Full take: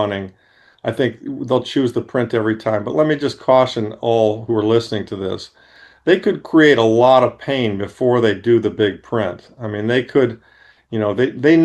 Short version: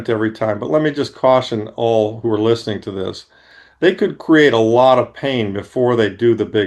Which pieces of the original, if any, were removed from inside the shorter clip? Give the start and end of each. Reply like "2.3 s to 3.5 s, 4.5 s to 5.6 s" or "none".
none